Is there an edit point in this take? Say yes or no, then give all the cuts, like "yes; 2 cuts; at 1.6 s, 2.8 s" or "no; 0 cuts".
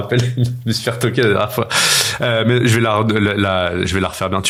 no; 0 cuts